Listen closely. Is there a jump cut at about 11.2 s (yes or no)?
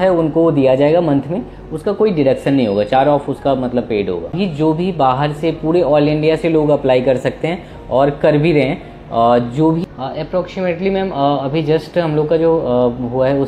no